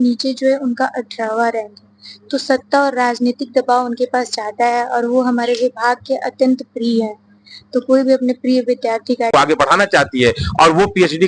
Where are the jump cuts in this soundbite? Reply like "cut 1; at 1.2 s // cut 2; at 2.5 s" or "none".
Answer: cut 1; at 9.3 s

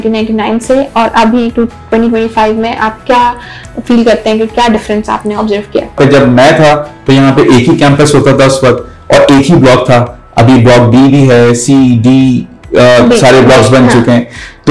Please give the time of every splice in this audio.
cut 1; at 6.0 s

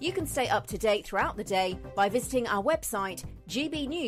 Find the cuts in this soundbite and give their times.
none

